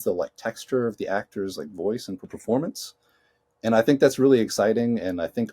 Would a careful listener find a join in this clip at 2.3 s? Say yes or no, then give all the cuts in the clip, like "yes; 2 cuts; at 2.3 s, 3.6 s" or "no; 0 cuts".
yes; 1 cut; at 2.3 s